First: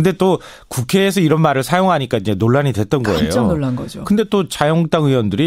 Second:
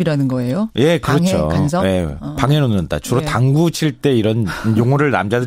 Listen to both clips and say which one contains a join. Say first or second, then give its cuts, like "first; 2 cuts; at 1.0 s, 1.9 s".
second; 1 cut; at 3.2 s